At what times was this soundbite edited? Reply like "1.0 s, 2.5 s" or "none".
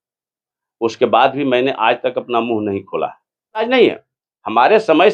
3.6 s

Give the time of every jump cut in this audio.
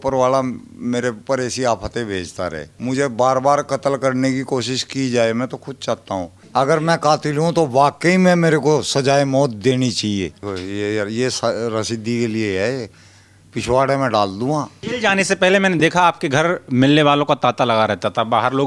2.7 s, 6.4 s, 10.4 s, 14.8 s

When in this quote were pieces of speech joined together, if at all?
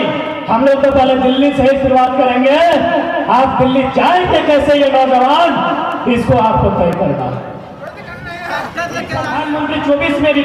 9.3 s

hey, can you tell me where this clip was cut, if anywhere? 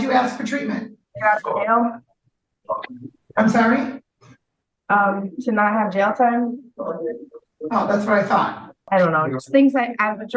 1.1 s, 8.8 s

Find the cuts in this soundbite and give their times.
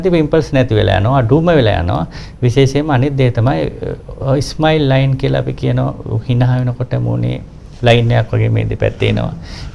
none

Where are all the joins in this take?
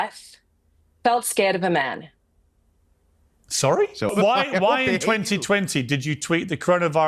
4.3 s

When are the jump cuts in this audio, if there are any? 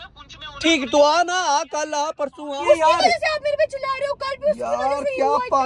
2.6 s

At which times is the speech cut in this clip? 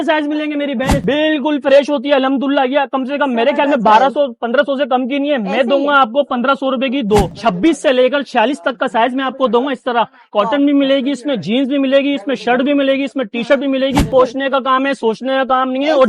0.9 s, 7.3 s, 14.1 s

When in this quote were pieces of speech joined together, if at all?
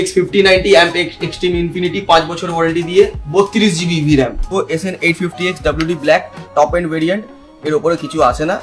4.5 s

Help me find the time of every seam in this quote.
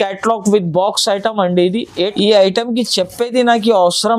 2.1 s

